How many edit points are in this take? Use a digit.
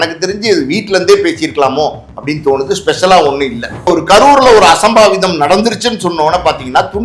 1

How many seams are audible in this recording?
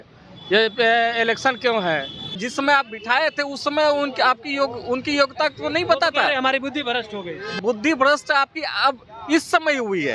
2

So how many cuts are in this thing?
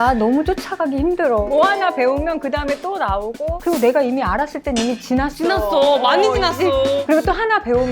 3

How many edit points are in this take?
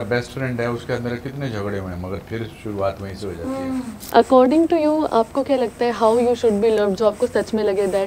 1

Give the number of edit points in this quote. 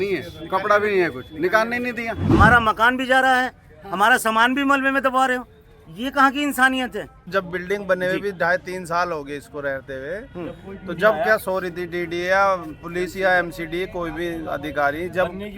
2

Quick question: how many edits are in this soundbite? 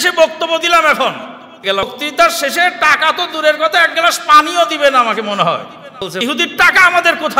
2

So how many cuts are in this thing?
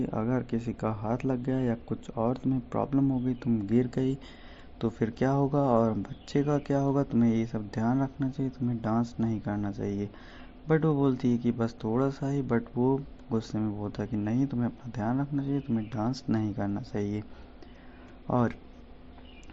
0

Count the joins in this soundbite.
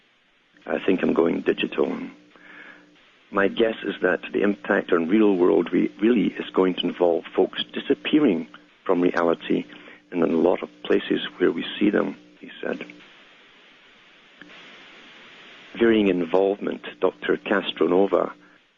1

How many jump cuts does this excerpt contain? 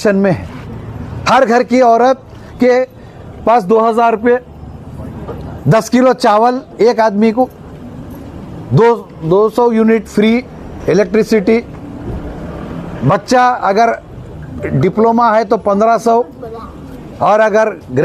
0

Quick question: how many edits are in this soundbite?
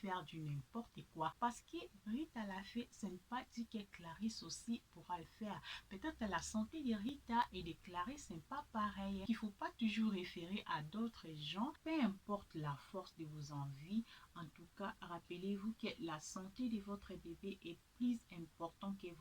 3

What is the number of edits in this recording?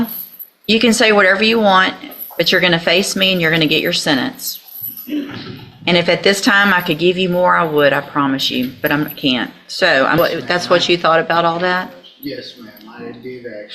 1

